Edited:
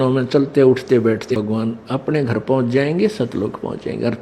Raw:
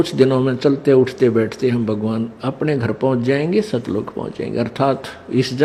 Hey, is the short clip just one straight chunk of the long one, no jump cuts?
no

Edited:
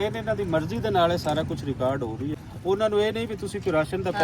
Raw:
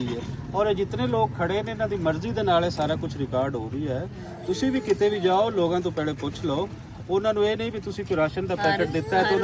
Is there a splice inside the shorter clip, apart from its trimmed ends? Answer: yes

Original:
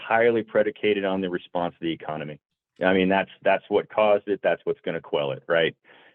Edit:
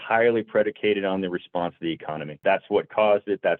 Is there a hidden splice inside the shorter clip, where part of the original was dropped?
yes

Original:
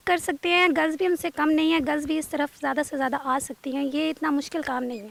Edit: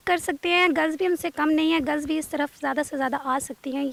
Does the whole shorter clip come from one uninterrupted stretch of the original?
yes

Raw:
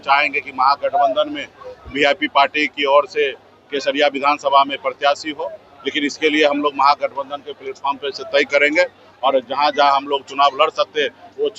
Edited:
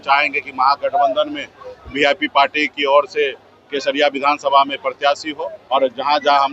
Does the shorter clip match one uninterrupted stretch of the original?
no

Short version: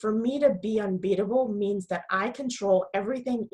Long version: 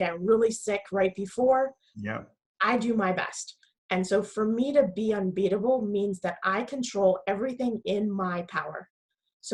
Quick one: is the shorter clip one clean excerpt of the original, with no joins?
yes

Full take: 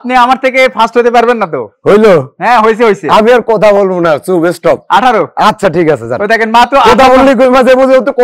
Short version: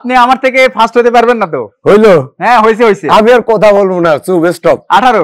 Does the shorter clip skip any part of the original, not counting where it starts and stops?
no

